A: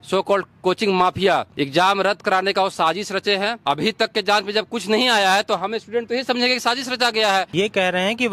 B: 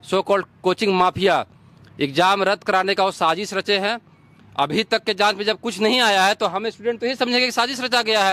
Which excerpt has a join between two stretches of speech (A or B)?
A